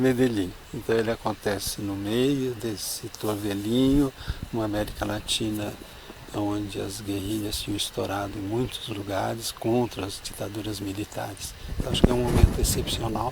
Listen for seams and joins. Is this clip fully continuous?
yes; 0 cuts

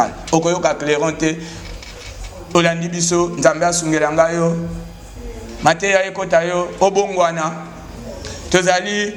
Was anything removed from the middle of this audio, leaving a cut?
no; 0 cuts

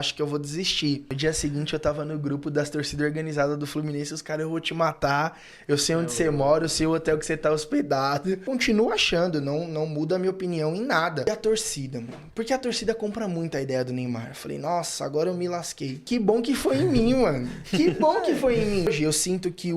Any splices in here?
yes; 5 cuts; at 1.1 s, 8.5 s, 11.2 s, 16.0 s, 18.9 s

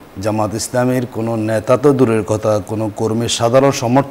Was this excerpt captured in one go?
yes; 0 cuts

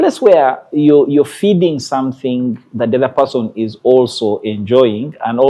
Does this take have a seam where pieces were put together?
no; 0 cuts

